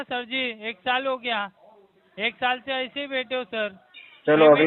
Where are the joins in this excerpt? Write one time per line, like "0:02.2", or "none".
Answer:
none